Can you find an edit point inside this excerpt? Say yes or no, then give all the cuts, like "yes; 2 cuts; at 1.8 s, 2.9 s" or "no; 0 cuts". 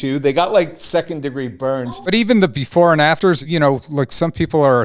yes; 2 cuts; at 1.9 s, 3.2 s